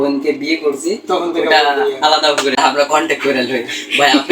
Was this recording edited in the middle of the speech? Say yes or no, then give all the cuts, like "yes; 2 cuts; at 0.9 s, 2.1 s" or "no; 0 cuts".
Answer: yes; 1 cut; at 2.6 s